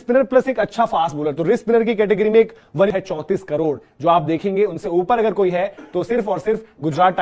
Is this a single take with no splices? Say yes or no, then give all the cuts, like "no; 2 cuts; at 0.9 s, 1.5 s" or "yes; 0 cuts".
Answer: no; 1 cut; at 2.9 s